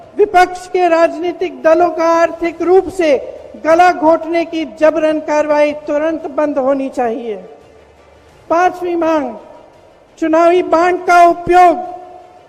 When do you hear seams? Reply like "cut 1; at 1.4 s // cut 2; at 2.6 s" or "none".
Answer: none